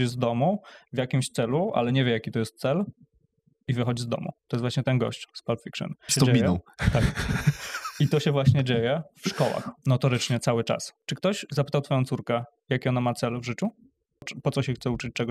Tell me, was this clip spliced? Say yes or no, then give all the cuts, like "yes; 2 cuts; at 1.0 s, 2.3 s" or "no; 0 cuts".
yes; 5 cuts; at 4.4 s, 6.1 s, 9.7 s, 11.0 s, 14.2 s